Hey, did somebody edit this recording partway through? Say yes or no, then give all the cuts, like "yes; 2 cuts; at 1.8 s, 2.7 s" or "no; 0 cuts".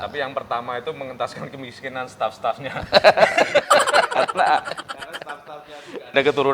no; 0 cuts